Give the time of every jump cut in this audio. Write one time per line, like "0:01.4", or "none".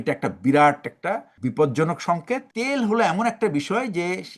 0:01.3
0:02.5